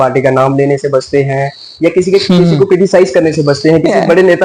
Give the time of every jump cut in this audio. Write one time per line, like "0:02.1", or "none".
none